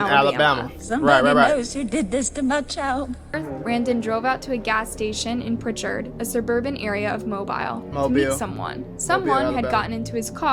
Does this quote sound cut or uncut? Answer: cut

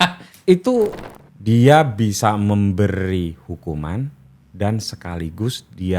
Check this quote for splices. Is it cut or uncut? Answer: cut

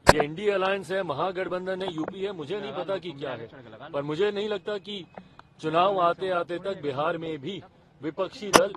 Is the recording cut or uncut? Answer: uncut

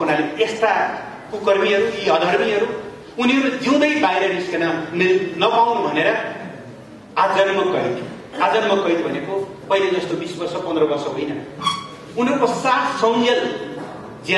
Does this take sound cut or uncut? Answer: uncut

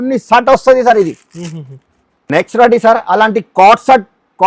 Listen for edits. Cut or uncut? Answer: uncut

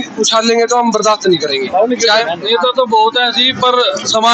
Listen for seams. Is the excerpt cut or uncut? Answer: cut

